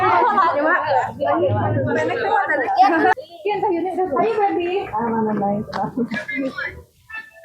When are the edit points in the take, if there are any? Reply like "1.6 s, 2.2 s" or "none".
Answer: 3.2 s